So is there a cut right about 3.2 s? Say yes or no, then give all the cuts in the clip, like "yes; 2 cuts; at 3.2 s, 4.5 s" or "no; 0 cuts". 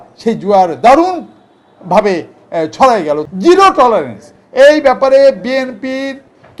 yes; 1 cut; at 3.2 s